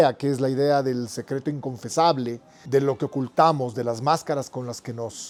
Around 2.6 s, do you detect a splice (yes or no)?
no